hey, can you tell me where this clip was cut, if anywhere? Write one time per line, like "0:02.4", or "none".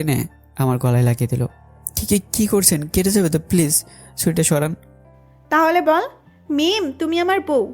none